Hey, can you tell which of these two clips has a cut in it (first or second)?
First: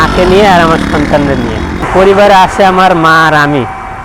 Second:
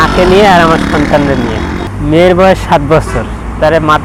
first